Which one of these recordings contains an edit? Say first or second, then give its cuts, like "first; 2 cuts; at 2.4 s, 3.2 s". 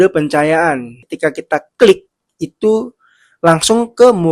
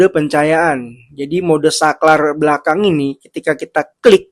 first; 1 cut; at 1.0 s